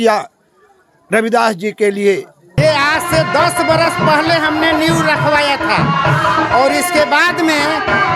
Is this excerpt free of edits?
no; 1 cut; at 2.6 s

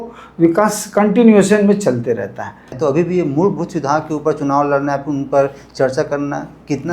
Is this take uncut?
no; 1 cut; at 2.7 s

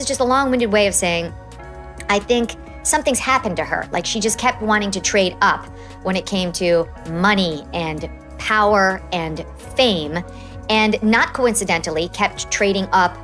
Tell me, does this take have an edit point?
no; 0 cuts

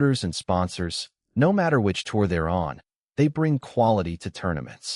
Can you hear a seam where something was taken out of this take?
no; 0 cuts

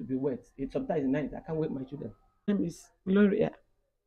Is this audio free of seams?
no; 1 cut; at 2.5 s

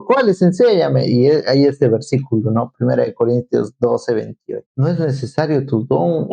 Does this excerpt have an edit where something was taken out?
yes; 1 cut; at 4.7 s

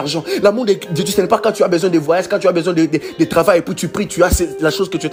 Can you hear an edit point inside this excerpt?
no; 0 cuts

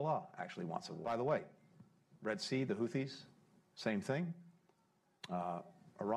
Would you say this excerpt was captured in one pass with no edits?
no; 1 cut; at 1.0 s

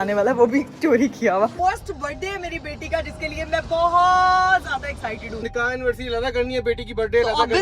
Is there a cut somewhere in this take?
yes; 2 cuts; at 1.5 s, 5.4 s

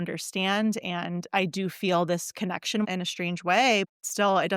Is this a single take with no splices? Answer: no; 2 cuts; at 2.8 s, 3.9 s

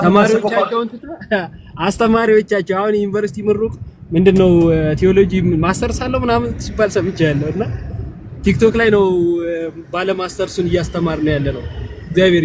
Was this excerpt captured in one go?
yes; 0 cuts

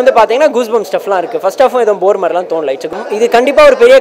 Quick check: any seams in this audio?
yes; 1 cut; at 2.9 s

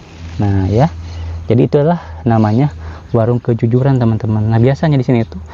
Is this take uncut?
yes; 0 cuts

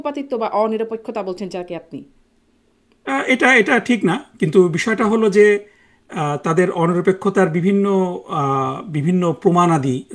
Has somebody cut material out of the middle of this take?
no; 0 cuts

